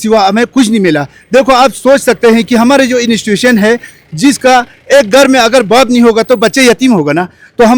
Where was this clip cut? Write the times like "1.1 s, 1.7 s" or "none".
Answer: none